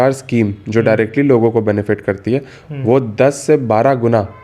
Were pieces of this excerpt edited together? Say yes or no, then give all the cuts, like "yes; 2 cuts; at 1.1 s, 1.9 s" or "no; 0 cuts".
no; 0 cuts